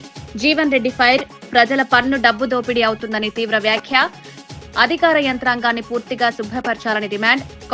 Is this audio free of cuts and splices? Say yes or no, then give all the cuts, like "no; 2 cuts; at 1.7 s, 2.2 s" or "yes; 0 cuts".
yes; 0 cuts